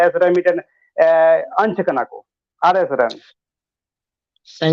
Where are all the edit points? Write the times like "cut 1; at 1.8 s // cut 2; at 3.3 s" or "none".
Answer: none

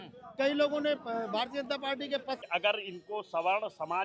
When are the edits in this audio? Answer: cut 1; at 2.4 s

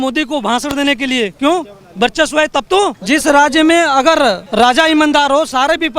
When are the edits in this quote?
cut 1; at 3.0 s // cut 2; at 4.4 s

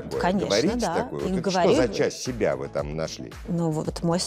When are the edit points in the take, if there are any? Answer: cut 1; at 2.9 s

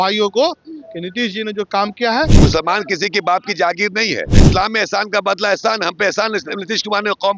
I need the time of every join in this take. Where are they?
cut 1; at 2.3 s // cut 2; at 4.4 s

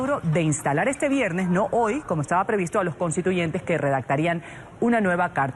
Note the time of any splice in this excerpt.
cut 1; at 1.4 s

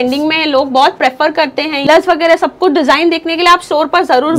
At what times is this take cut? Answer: cut 1; at 1.9 s

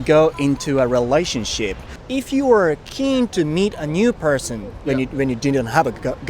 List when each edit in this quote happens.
cut 1; at 1.9 s

